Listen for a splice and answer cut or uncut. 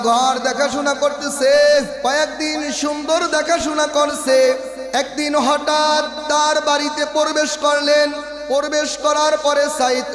cut